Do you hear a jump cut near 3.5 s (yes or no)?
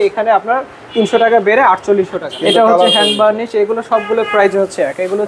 no